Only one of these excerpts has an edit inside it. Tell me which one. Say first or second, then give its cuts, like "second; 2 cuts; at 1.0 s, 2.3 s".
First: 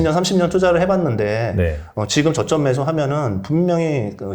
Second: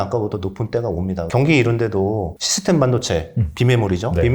second; 2 cuts; at 1.2 s, 2.4 s